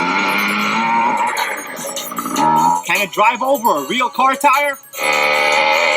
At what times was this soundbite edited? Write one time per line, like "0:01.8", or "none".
none